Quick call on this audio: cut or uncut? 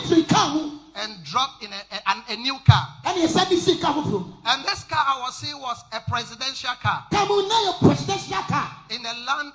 uncut